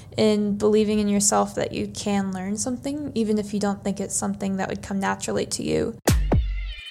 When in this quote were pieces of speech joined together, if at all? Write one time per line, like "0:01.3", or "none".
0:06.0